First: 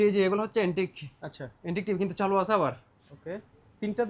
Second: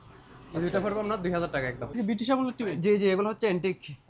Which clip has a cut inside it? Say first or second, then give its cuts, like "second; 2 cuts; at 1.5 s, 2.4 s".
second; 1 cut; at 1.8 s